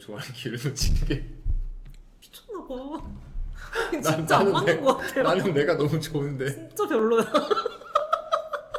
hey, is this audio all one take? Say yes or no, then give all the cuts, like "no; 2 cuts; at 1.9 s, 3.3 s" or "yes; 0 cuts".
yes; 0 cuts